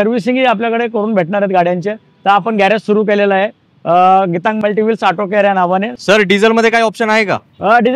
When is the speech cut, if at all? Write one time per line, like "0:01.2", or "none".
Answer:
0:06.0